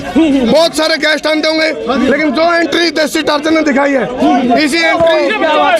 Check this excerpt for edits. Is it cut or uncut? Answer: uncut